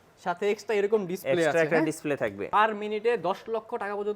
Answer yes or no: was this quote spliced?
yes